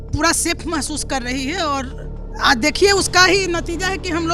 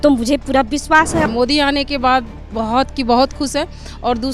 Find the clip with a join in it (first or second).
second